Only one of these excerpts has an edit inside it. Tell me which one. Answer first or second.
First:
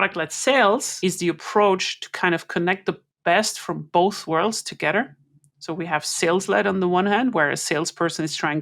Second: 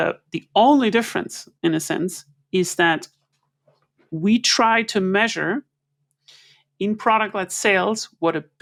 first